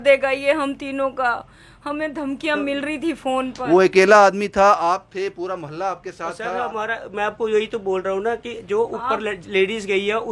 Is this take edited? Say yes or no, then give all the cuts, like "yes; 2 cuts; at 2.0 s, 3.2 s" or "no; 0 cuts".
no; 0 cuts